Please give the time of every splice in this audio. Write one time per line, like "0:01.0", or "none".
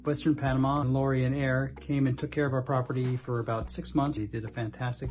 0:00.9
0:04.2